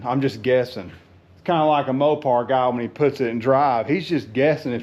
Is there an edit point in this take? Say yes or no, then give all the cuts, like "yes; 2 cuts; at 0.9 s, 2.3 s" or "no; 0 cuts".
no; 0 cuts